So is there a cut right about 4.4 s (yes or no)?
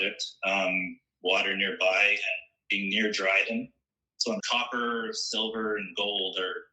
yes